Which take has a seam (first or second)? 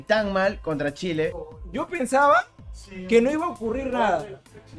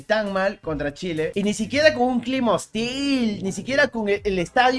first